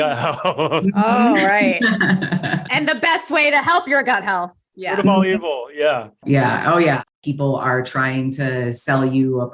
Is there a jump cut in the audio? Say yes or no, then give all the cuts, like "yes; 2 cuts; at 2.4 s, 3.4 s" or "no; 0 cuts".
yes; 2 cuts; at 6.2 s, 7.0 s